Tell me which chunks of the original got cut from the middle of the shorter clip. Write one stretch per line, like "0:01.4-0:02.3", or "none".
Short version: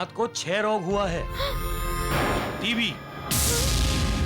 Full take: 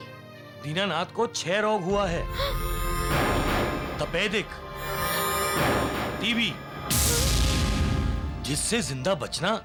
0:03.4-0:06.0